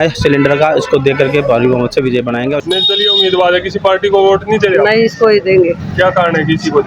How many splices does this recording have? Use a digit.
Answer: 1